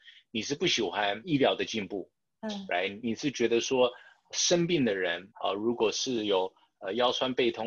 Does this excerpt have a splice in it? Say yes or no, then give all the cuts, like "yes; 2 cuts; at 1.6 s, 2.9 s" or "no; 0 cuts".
yes; 2 cuts; at 3.0 s, 5.3 s